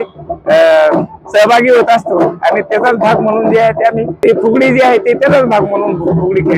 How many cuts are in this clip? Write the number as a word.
one